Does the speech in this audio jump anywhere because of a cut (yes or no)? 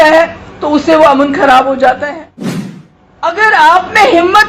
yes